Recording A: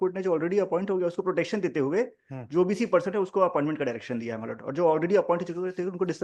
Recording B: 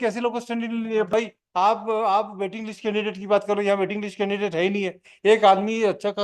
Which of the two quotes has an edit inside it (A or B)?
B